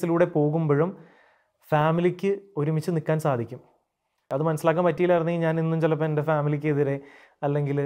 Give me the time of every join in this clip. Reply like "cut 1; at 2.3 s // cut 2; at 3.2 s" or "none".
cut 1; at 4.3 s

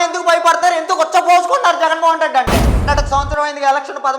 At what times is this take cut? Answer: cut 1; at 2.8 s

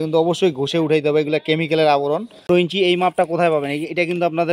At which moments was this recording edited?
cut 1; at 2.5 s

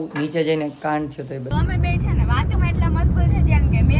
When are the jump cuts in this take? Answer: cut 1; at 1.5 s

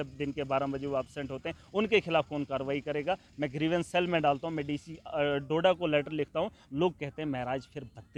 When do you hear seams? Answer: none

